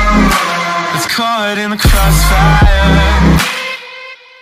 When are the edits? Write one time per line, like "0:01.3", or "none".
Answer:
0:00.9